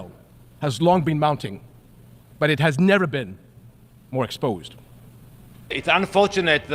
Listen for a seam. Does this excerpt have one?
yes; 1 cut; at 5.8 s

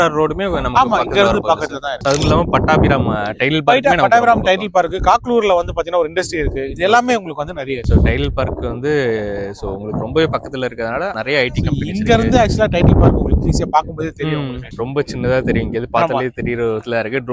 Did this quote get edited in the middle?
no; 0 cuts

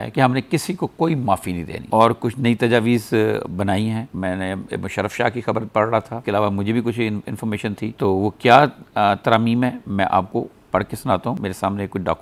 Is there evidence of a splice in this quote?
no; 0 cuts

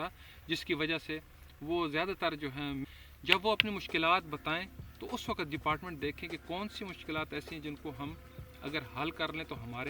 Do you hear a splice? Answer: yes; 1 cut; at 2.8 s

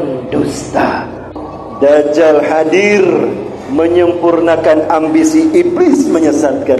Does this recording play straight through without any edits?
no; 1 cut; at 1.3 s

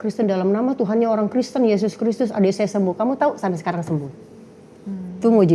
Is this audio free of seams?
yes; 0 cuts

